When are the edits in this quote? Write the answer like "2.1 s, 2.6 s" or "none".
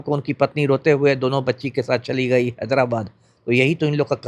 none